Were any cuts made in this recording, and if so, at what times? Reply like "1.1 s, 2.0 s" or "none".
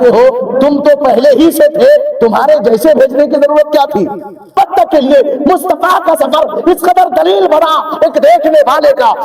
4.5 s

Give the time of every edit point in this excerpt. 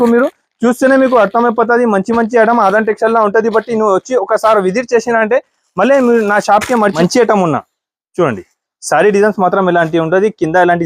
6.9 s

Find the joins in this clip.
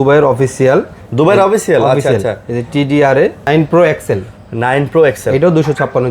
3.5 s

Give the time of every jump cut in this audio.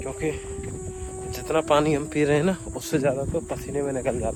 none

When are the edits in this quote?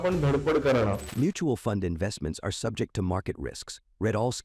1.1 s

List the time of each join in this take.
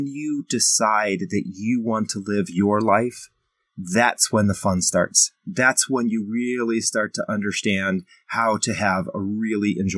none

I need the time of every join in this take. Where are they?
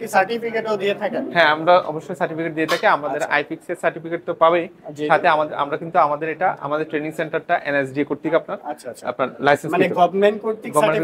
none

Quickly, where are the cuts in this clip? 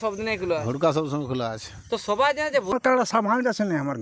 2.7 s

